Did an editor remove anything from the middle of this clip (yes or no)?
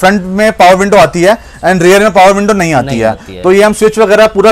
no